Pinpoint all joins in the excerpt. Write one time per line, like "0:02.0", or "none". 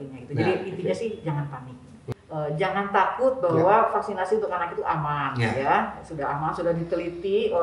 0:02.1